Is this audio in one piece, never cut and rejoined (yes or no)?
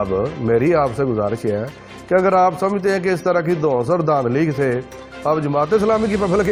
yes